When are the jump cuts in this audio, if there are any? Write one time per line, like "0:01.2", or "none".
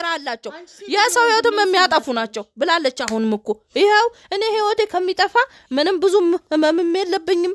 none

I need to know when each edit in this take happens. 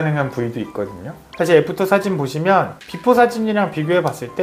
0:01.3

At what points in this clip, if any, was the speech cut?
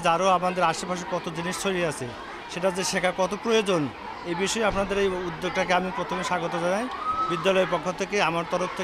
none

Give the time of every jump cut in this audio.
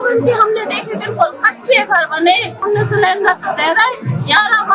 0:02.6

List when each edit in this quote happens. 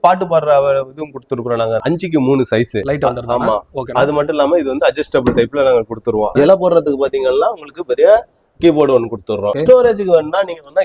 0:01.8
0:02.8
0:06.3
0:09.5

